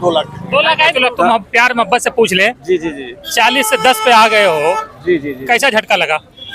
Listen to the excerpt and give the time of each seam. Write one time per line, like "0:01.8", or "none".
0:00.9